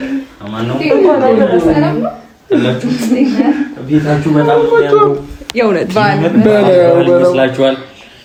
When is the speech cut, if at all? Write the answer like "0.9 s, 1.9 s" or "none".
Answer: none